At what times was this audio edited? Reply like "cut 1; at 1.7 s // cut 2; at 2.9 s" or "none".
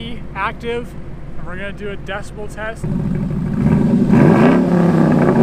cut 1; at 1.2 s // cut 2; at 2.8 s